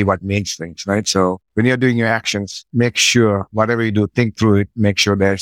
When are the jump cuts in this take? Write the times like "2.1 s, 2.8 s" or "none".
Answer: 1.4 s